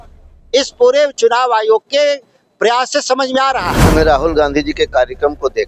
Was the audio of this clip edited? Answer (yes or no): yes